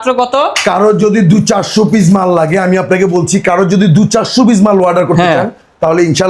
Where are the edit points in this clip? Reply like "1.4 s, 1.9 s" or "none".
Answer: none